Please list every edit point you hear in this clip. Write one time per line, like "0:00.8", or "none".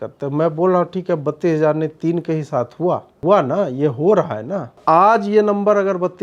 0:03.2
0:04.8